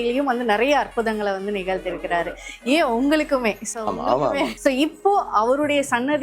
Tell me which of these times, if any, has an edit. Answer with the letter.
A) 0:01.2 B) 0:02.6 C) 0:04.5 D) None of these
C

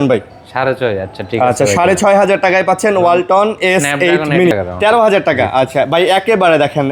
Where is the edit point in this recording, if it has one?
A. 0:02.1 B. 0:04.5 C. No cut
B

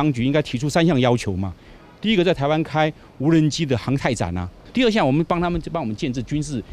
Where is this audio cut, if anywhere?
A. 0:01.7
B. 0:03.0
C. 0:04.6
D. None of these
C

